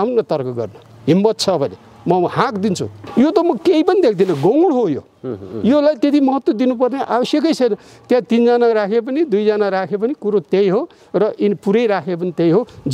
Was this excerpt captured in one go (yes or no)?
no